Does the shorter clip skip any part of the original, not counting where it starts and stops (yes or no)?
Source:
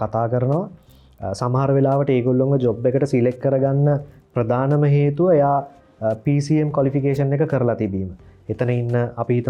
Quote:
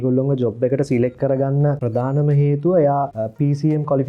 yes